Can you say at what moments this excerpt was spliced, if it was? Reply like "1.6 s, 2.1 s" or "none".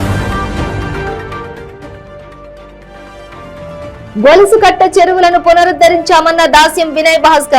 1.3 s